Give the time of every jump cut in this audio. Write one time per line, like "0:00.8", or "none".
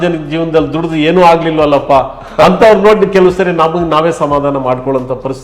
none